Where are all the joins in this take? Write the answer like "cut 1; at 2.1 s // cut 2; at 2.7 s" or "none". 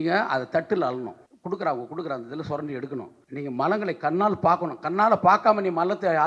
cut 1; at 1.3 s // cut 2; at 3.2 s